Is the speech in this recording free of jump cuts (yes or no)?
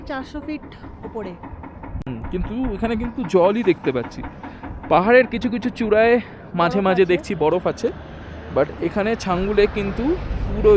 yes